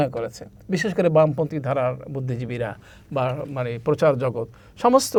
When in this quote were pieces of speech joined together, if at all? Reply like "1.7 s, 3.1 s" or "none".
none